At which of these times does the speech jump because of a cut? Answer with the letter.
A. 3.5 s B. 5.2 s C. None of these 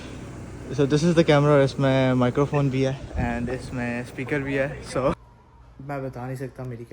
B